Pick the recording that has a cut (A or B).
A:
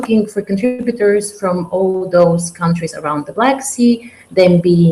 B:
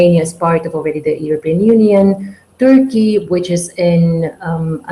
A